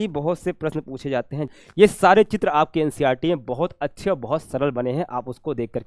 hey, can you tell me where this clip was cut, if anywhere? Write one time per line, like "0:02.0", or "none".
0:01.5